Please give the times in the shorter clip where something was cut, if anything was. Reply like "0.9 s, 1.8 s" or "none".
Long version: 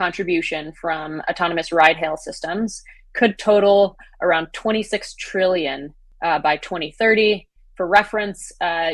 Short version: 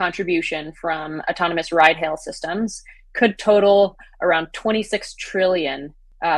none